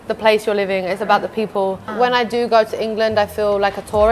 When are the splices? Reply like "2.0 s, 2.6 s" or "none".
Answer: 1.8 s

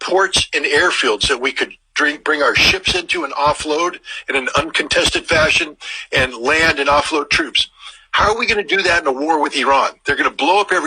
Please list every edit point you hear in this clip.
4.7 s

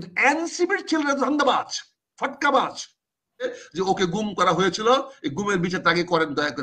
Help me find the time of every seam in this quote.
3.5 s

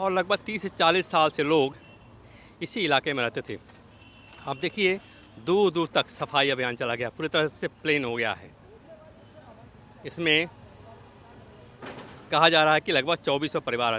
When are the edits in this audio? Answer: none

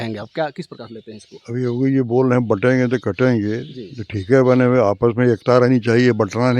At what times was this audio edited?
none

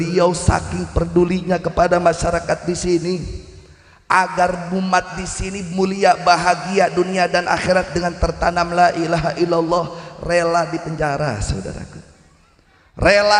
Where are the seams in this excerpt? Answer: none

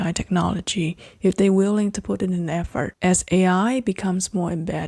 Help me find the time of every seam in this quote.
2.9 s

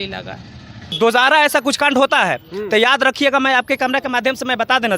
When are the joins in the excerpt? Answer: 0.9 s

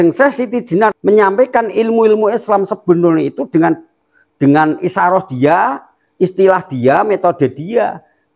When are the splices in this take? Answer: 1.0 s

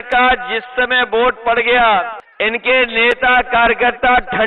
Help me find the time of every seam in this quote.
2.2 s

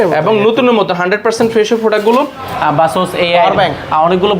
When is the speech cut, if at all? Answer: 2.5 s

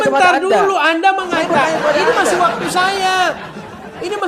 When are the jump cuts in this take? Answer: none

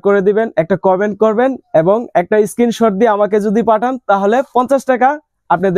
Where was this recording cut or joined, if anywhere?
none

